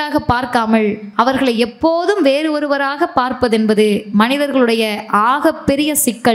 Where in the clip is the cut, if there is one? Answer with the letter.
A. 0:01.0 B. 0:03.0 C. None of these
A